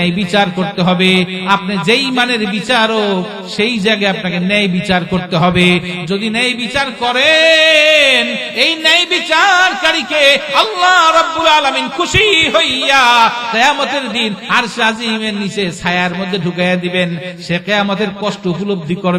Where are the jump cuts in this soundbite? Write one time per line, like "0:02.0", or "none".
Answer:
none